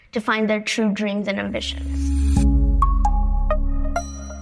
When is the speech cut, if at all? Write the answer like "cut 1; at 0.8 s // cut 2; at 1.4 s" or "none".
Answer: cut 1; at 1.8 s